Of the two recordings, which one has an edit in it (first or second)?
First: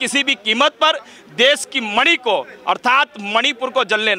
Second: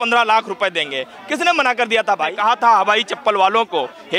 second